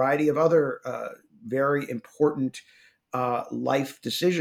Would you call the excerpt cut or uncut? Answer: uncut